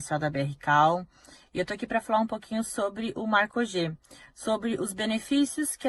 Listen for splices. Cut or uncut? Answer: uncut